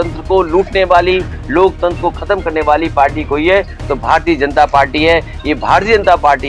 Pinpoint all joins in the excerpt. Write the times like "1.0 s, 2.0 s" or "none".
none